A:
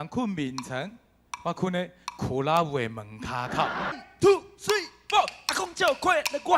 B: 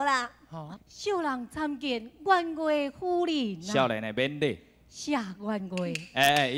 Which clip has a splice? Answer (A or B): A